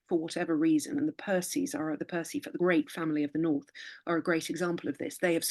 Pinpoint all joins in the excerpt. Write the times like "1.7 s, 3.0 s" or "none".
2.5 s

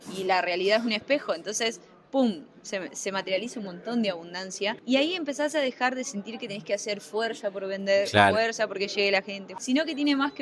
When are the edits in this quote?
4.8 s, 9.4 s

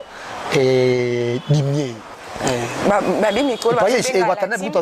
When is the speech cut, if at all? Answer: 2.2 s

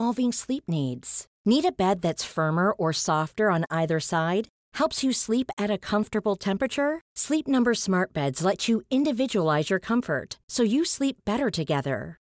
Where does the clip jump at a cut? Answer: none

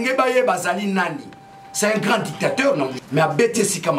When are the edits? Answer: 3.0 s

